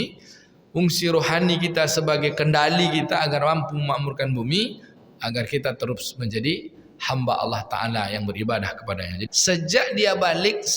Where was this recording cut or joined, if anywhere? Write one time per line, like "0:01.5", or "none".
0:09.2